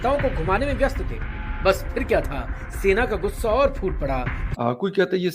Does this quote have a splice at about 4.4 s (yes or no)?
yes